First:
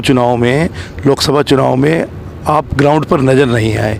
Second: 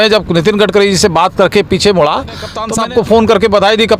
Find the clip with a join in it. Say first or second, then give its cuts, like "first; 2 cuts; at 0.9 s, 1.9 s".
second; 1 cut; at 2.6 s